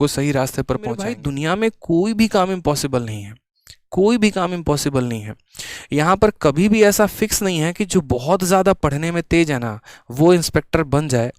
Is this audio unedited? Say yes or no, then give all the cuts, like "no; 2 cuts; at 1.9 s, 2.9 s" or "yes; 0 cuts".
no; 1 cut; at 1.2 s